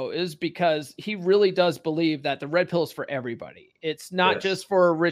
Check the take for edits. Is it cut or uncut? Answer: uncut